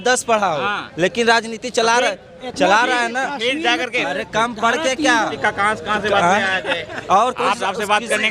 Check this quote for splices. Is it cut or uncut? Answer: cut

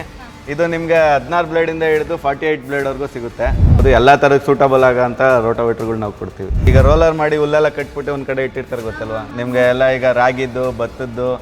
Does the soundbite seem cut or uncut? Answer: cut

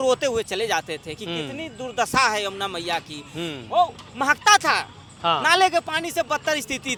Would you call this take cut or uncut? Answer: uncut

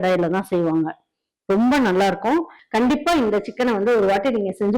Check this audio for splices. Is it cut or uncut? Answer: cut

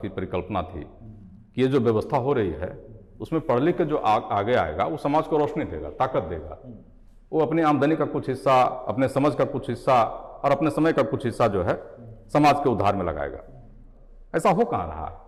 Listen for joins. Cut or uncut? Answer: uncut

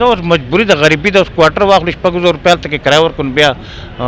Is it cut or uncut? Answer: uncut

